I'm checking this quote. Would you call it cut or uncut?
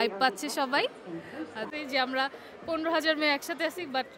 cut